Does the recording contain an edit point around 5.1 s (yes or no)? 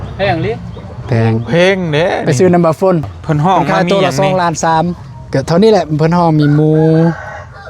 yes